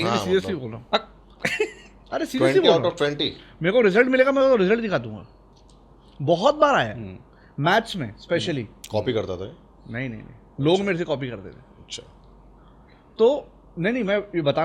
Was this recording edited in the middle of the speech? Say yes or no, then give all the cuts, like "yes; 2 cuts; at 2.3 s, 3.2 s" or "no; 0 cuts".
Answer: no; 0 cuts